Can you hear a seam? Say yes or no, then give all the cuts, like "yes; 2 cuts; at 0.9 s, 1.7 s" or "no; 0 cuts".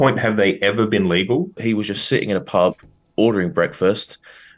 yes; 1 cut; at 1.6 s